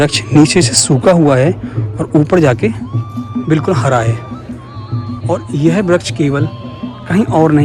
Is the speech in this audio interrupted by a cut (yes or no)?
no